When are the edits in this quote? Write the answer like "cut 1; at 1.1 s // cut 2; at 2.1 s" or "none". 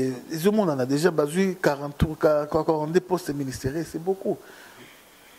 none